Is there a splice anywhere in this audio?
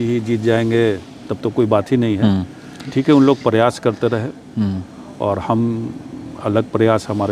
no; 0 cuts

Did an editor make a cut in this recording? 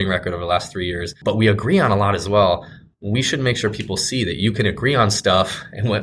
yes; 1 cut; at 1.1 s

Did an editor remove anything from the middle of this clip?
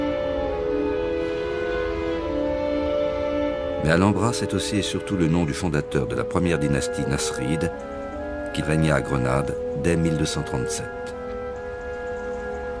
yes; 1 cut; at 1.6 s

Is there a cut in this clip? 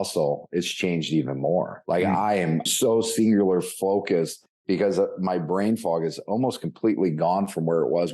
yes; 2 cuts; at 1.8 s, 2.7 s

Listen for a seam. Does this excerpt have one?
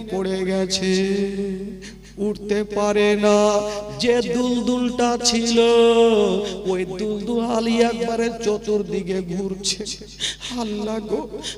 no; 0 cuts

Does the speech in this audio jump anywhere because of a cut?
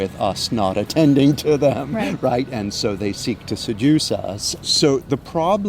yes; 1 cut; at 4.5 s

